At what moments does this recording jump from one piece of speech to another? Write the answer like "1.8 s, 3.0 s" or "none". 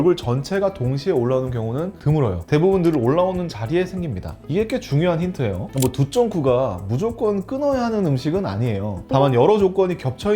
5.6 s, 8.9 s